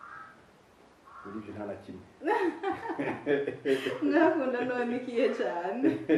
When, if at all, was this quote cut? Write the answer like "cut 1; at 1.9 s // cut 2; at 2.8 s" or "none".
none